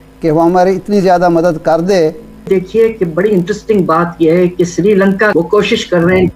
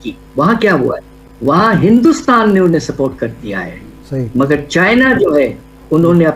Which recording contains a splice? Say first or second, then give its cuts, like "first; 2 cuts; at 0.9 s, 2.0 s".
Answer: first; 1 cut; at 2.5 s